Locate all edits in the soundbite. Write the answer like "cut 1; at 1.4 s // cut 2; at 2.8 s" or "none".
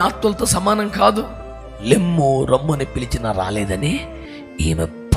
cut 1; at 1.8 s